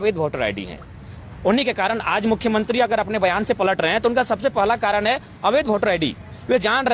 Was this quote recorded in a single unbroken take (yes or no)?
yes